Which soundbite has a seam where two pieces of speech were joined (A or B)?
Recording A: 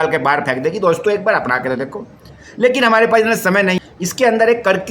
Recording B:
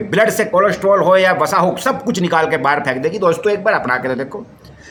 A